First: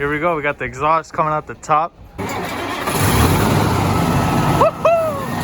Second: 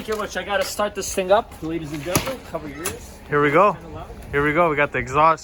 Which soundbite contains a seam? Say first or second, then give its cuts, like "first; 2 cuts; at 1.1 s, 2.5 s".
first; 1 cut; at 2.2 s